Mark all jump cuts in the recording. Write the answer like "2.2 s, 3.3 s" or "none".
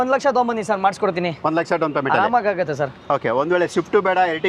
none